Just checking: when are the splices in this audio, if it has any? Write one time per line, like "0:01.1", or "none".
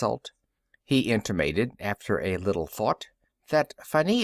0:03.1